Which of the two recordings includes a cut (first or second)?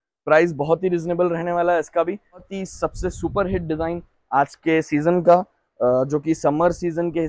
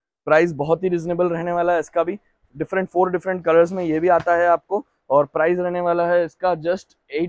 first